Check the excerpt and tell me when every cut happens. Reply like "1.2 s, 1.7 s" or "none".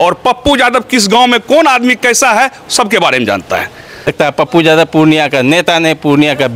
4.1 s